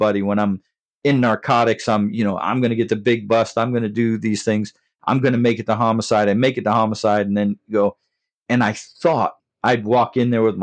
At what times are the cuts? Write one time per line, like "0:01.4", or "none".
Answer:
0:09.5